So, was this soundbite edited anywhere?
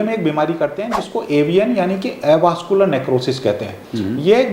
no; 0 cuts

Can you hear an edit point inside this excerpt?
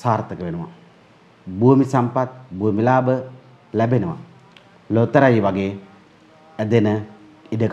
no; 0 cuts

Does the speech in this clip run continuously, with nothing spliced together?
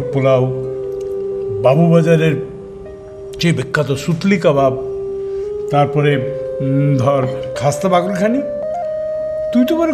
yes; 0 cuts

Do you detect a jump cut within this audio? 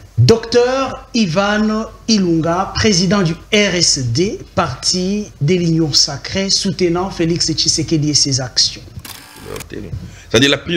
yes; 1 cut; at 9.3 s

